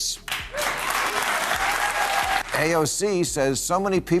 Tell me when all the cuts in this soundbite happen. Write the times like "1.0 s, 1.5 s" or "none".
2.4 s